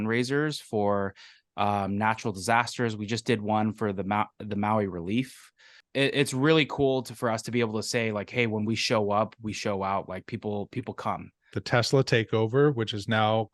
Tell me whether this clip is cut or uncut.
cut